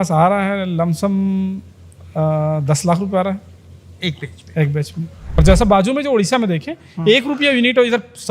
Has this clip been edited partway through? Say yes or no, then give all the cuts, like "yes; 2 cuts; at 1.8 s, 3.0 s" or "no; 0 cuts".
yes; 1 cut; at 5.4 s